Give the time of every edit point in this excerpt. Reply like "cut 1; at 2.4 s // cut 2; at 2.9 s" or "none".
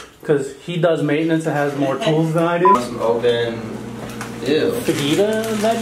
cut 1; at 2.8 s